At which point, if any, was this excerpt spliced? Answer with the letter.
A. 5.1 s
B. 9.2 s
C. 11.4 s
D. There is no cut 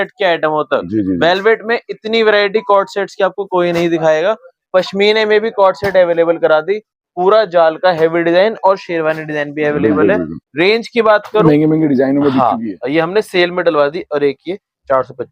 C